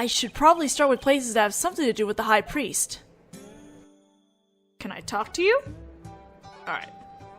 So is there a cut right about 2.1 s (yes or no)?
yes